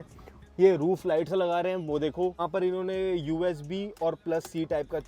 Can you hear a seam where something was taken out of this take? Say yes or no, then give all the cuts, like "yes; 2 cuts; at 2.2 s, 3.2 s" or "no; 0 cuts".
yes; 1 cut; at 2.4 s